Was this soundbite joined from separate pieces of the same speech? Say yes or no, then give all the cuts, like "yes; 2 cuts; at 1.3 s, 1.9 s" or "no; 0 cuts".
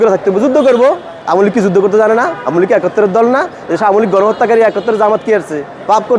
yes; 1 cut; at 1.1 s